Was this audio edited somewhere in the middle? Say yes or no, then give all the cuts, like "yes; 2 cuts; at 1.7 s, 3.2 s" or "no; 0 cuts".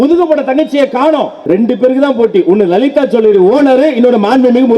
yes; 1 cut; at 1.3 s